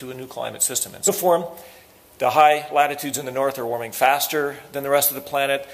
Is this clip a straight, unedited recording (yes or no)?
yes